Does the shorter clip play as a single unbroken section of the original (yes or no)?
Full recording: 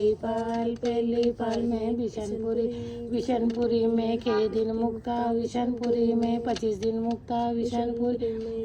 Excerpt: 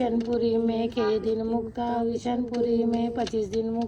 yes